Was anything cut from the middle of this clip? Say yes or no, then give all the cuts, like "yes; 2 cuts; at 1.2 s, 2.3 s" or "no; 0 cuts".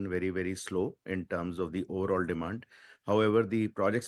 no; 0 cuts